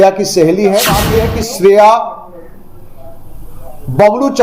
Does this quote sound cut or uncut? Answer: cut